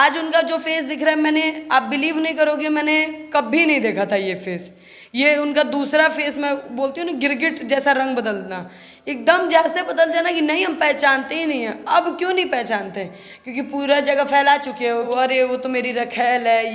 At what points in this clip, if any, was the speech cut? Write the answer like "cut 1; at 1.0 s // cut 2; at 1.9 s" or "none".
none